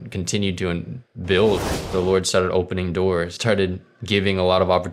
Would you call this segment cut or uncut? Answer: cut